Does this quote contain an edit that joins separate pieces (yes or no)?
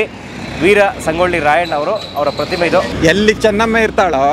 yes